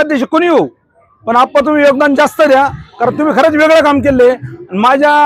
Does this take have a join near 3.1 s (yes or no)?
no